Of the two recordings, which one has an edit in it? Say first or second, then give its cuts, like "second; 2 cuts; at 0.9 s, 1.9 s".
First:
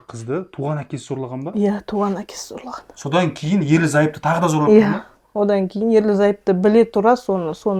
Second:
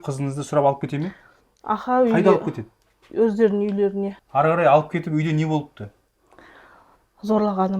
second; 1 cut; at 4.1 s